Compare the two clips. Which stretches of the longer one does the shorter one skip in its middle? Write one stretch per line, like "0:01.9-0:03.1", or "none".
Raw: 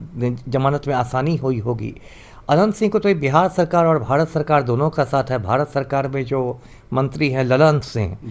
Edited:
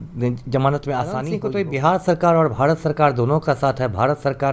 0:01.3-0:02.9